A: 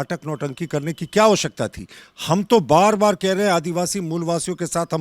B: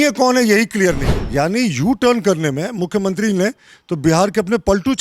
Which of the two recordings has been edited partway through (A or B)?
B